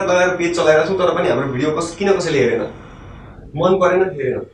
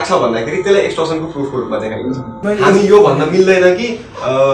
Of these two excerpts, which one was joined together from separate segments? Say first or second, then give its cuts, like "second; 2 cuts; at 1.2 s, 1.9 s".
second; 1 cut; at 2.3 s